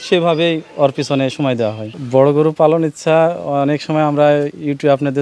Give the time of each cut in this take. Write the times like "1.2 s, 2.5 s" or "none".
1.9 s